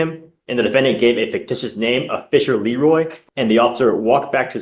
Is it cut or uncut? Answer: cut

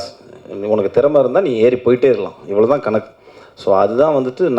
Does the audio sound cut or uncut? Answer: uncut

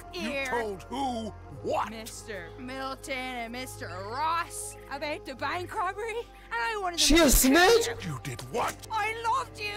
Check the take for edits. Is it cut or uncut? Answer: cut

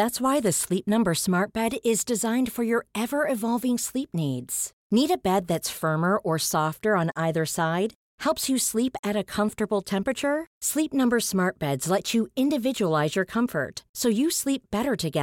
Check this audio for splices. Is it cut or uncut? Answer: uncut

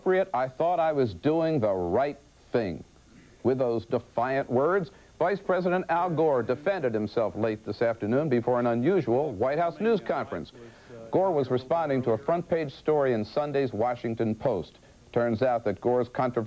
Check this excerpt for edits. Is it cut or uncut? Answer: cut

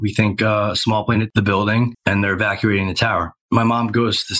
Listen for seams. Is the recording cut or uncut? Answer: cut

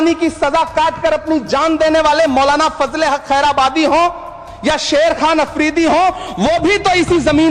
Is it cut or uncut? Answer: uncut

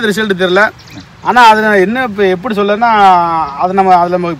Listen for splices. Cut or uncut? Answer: uncut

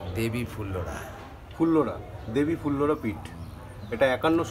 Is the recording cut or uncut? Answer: uncut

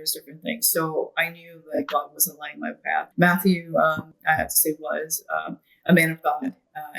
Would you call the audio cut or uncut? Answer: cut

